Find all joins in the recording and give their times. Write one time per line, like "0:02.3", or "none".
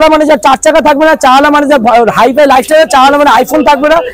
none